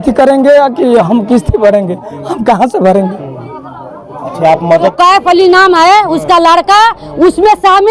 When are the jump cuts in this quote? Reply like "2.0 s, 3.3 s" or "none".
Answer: 4.9 s